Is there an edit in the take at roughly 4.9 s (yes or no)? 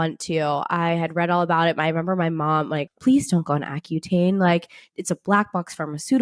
no